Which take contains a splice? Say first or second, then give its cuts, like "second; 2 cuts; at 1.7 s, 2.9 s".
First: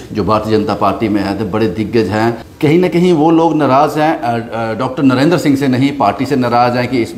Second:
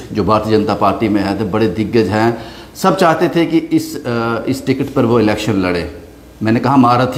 first; 1 cut; at 2.5 s